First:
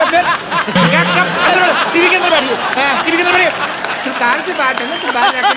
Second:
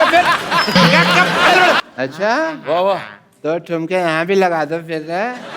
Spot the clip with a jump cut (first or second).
second